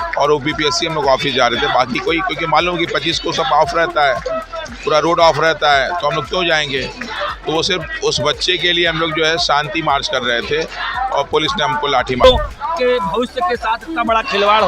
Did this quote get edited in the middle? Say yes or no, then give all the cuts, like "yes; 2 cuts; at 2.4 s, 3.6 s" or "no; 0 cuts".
yes; 1 cut; at 12.2 s